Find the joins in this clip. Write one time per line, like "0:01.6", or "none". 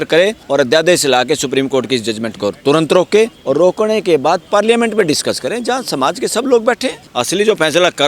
0:07.0